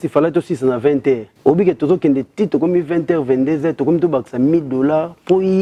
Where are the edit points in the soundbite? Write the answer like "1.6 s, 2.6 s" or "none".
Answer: 1.3 s